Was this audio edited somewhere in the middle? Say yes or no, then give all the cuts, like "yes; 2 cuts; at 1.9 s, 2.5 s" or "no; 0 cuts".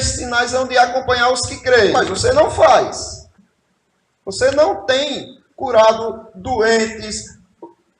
yes; 1 cut; at 1.9 s